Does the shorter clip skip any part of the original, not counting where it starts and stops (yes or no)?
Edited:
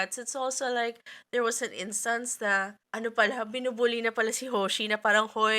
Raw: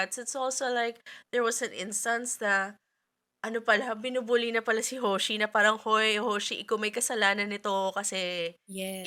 yes